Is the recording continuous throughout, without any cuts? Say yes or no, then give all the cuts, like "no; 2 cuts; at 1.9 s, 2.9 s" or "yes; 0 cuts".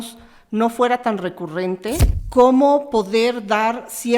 no; 1 cut; at 2.1 s